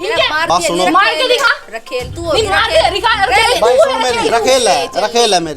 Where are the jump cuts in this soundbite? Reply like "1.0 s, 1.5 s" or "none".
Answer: 4.3 s